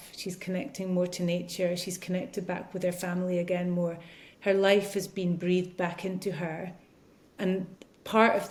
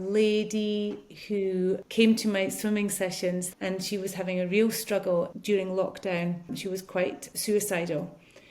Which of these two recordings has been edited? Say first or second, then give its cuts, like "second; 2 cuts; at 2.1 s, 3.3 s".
second; 4 cuts; at 1.8 s, 3.5 s, 5.3 s, 7.0 s